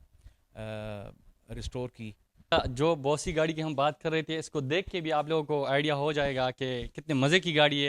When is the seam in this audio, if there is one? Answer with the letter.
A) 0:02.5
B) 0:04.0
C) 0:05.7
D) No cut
A